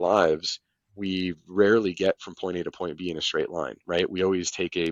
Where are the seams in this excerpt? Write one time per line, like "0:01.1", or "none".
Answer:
none